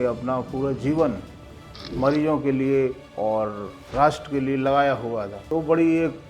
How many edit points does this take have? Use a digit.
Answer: 2